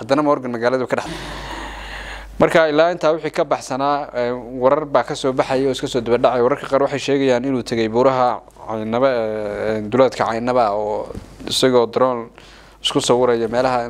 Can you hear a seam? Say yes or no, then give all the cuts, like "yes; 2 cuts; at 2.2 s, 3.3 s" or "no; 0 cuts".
yes; 1 cut; at 1.1 s